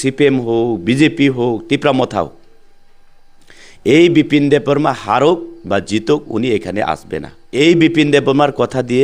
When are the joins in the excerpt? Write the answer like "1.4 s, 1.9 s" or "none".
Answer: 7.4 s